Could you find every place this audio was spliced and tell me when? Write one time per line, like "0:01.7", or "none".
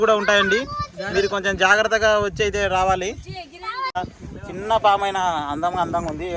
0:04.0